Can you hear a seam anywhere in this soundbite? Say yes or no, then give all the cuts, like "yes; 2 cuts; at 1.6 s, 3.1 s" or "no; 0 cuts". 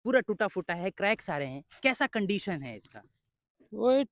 no; 0 cuts